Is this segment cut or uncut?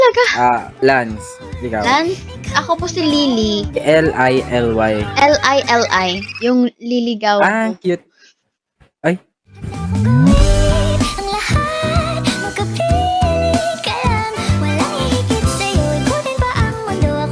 uncut